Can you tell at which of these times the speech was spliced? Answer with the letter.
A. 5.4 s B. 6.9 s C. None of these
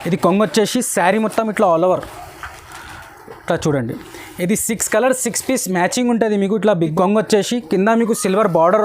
B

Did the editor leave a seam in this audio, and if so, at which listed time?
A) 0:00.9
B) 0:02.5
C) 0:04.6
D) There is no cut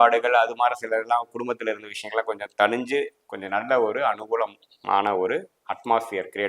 D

